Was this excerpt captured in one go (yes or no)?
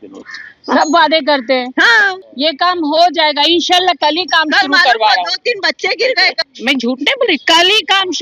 no